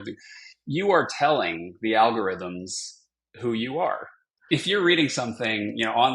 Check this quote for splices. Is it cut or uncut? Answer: cut